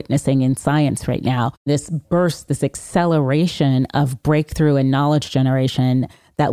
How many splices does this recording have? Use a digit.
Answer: 1